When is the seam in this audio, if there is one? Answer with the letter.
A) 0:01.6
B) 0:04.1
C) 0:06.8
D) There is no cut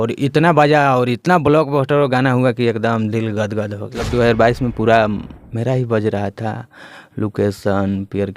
B